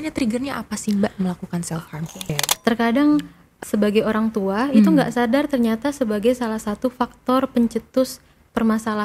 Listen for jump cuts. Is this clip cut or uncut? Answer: cut